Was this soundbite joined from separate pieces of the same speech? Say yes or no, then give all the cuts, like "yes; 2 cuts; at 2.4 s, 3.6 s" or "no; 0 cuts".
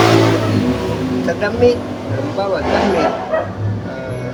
no; 0 cuts